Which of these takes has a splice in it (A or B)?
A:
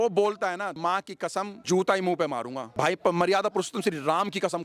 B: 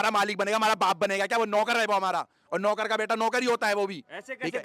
A